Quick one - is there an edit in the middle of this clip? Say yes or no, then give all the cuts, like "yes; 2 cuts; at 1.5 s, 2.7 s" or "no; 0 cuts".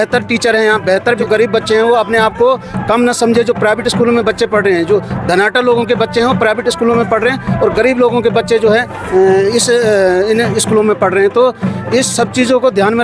yes; 1 cut; at 1.2 s